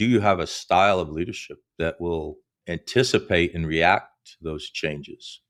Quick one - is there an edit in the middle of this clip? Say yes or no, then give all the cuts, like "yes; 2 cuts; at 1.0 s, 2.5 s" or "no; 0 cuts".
no; 0 cuts